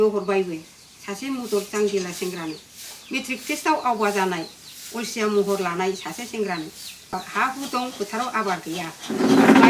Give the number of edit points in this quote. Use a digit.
1